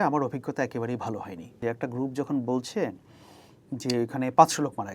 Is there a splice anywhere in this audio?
yes; 1 cut; at 1.5 s

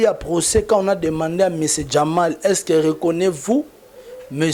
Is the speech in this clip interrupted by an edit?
no; 0 cuts

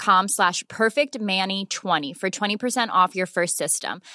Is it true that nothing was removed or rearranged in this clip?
yes; 0 cuts

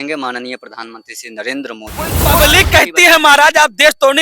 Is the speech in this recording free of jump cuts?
no; 1 cut; at 2.2 s

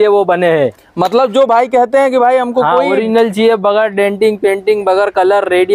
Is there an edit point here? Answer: no; 0 cuts

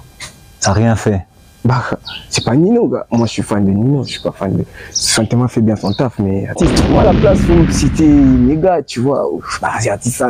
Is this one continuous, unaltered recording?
no; 1 cut; at 6.5 s

